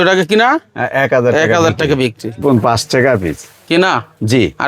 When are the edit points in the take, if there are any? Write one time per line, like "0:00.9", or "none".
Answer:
0:02.4

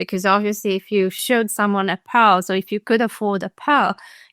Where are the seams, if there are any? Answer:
0:01.2

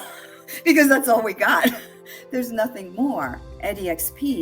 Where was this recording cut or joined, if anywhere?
0:03.4

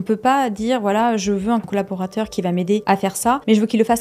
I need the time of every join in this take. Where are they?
0:01.7
0:03.2

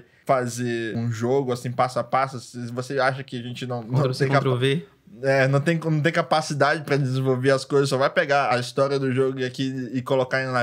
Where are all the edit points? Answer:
none

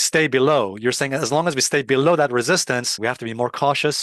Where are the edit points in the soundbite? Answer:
0:02.9

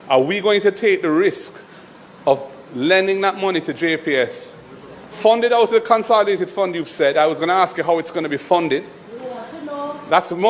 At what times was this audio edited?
none

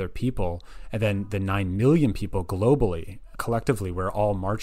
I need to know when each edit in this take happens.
0:03.3

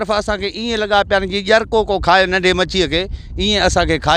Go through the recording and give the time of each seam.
none

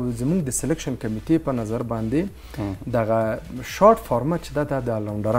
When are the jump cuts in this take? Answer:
none

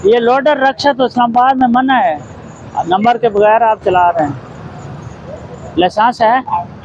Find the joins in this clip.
none

